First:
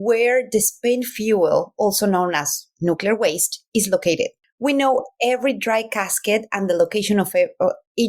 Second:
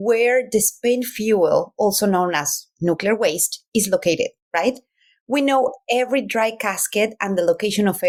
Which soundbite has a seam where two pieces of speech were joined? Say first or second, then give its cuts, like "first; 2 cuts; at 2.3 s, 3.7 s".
first; 1 cut; at 4.4 s